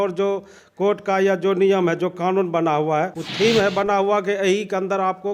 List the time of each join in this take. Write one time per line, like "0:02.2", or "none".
0:03.2